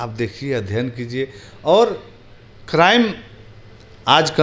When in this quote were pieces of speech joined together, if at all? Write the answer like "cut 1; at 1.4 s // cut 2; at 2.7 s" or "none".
none